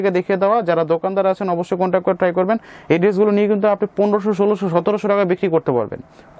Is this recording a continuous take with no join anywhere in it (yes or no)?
yes